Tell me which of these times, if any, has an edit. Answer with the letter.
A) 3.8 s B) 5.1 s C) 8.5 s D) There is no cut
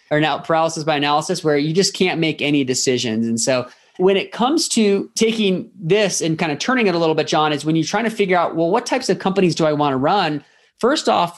B